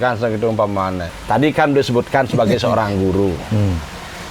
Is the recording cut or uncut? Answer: cut